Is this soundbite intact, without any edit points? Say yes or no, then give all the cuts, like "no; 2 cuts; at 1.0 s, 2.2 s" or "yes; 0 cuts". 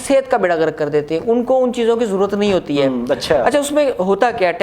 yes; 0 cuts